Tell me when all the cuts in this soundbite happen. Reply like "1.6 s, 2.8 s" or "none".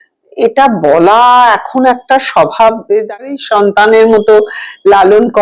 3.3 s